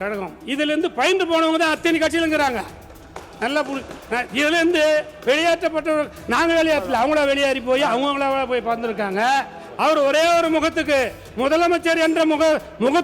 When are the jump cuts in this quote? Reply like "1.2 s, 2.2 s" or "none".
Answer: 9.6 s